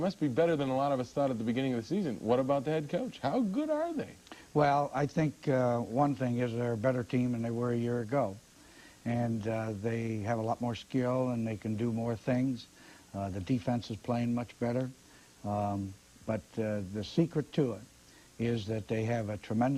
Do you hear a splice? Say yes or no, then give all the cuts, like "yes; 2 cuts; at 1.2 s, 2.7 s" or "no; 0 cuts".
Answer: no; 0 cuts